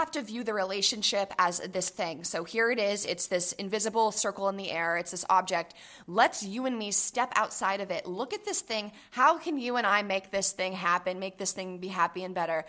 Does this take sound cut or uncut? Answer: uncut